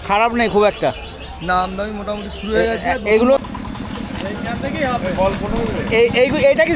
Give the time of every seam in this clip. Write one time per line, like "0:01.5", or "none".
0:03.4